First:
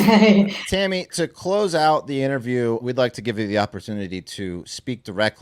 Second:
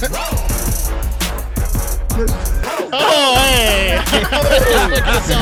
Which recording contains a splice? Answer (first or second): first